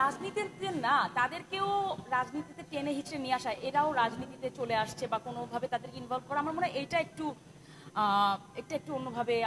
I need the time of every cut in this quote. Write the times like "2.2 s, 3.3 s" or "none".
none

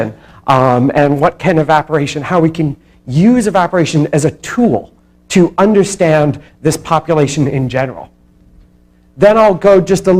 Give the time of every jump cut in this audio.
none

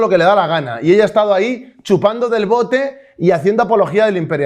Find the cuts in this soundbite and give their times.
none

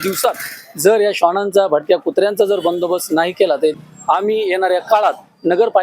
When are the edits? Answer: 3.7 s

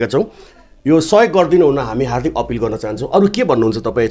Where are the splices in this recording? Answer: none

